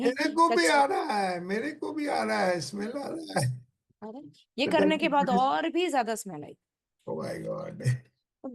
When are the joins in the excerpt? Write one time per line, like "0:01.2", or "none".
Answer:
none